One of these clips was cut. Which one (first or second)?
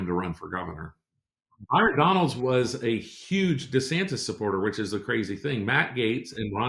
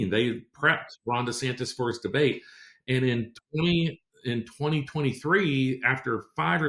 first